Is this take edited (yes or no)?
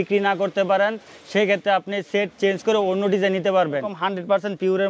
yes